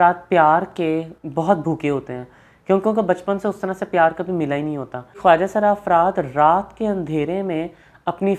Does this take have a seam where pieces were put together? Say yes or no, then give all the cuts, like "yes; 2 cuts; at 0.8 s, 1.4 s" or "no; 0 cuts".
yes; 2 cuts; at 1.2 s, 5.2 s